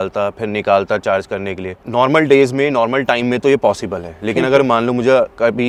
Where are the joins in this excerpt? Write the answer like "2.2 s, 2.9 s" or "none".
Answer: none